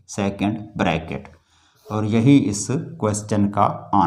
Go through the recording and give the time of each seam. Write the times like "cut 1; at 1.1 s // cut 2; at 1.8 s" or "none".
none